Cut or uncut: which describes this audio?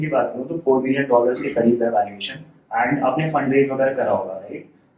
uncut